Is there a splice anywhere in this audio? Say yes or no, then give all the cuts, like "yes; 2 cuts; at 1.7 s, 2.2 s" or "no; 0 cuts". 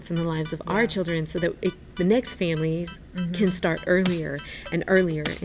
no; 0 cuts